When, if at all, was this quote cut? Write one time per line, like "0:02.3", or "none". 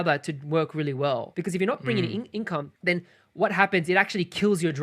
0:01.3
0:02.7